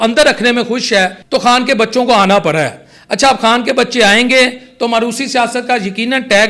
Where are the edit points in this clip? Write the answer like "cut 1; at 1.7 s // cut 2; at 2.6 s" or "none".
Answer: cut 1; at 1.2 s